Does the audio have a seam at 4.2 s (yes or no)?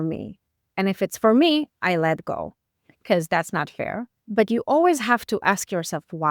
yes